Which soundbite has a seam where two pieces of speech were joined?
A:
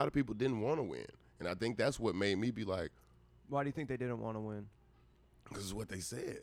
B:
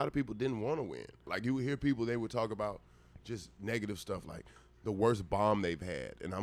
B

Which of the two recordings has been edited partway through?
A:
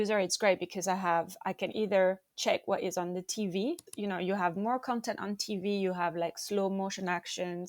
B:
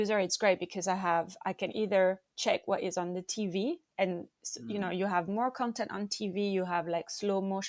A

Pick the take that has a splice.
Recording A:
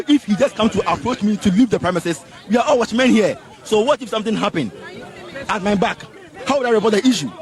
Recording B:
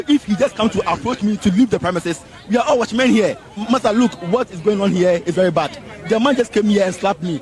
B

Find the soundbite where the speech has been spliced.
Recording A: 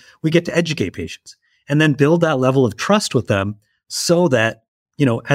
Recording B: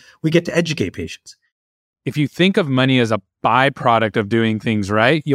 B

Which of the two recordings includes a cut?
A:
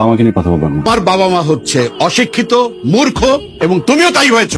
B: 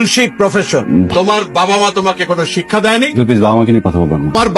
B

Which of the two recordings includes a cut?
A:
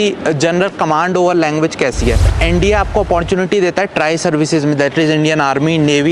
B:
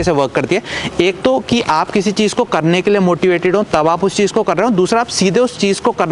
A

